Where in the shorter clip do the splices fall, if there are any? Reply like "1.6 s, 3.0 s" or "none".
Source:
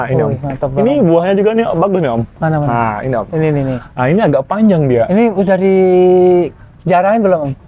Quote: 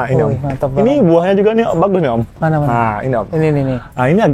none